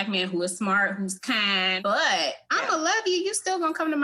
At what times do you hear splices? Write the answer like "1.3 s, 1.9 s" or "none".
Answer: 1.7 s